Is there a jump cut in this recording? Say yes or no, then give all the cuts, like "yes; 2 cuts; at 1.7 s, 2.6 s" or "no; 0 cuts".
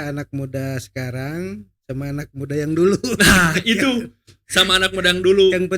no; 0 cuts